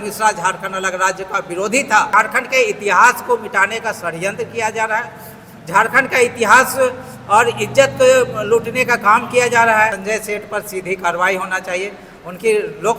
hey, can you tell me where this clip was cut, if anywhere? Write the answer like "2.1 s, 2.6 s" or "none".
2.1 s, 10.0 s